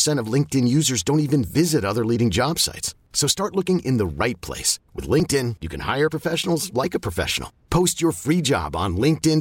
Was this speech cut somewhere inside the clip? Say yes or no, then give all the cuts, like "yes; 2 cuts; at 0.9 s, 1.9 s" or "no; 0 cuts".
no; 0 cuts